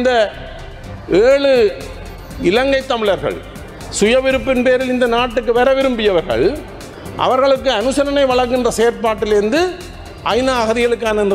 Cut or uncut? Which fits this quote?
uncut